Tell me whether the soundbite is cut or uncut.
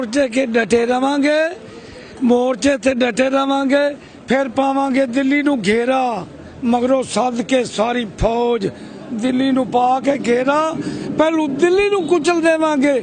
uncut